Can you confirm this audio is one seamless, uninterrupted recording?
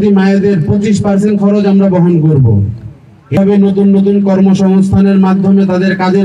no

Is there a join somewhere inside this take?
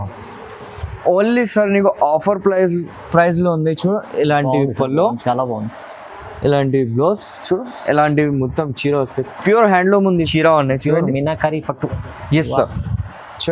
yes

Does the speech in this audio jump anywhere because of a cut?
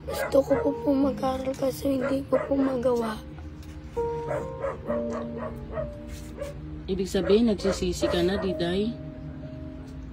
no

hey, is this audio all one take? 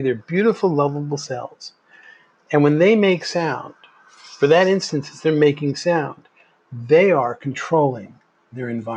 yes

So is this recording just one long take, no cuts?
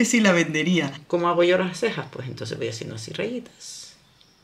no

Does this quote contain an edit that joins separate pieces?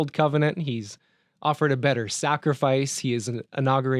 no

